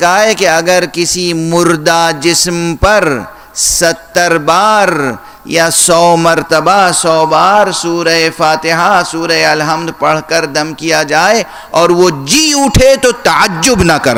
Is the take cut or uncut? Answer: uncut